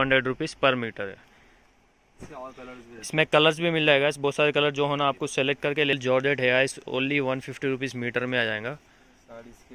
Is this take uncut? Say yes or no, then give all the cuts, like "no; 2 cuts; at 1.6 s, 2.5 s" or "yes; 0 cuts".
no; 2 cuts; at 1.3 s, 5.9 s